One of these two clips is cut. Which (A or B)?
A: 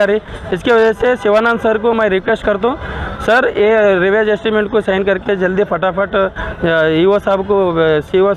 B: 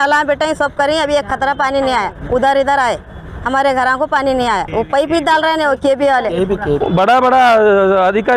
B